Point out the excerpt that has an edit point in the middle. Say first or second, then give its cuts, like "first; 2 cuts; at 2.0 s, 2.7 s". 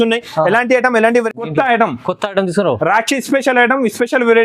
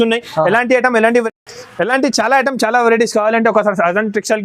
first; 1 cut; at 1.5 s